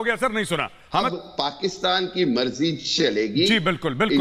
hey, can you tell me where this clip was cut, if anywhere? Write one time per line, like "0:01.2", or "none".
0:01.1